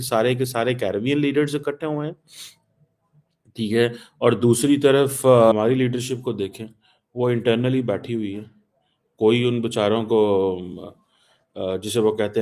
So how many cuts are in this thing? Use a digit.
1